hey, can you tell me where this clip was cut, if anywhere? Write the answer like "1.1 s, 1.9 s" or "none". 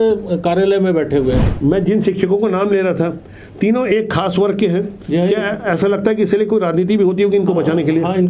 1.5 s